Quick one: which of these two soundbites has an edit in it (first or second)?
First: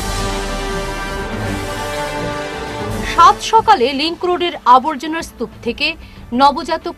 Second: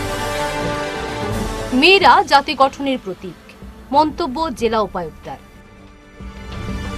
second